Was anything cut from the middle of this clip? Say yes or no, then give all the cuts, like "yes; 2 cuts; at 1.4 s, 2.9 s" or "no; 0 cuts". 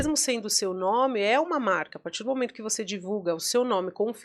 no; 0 cuts